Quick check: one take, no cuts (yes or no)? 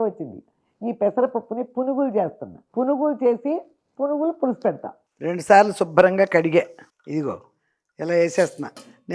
no